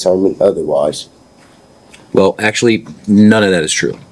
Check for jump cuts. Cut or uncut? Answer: uncut